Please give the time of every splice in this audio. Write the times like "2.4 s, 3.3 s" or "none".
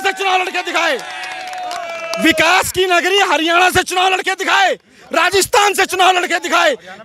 none